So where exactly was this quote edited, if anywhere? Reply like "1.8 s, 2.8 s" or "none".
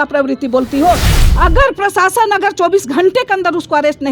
1.1 s